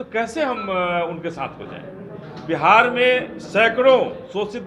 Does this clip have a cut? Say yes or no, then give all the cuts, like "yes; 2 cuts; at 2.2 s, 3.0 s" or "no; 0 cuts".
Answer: no; 0 cuts